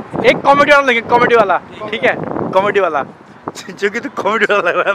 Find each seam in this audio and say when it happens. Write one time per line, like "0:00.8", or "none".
none

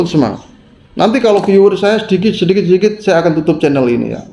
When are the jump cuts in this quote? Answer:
none

